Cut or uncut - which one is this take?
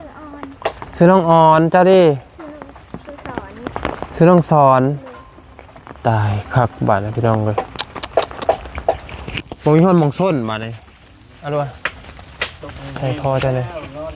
uncut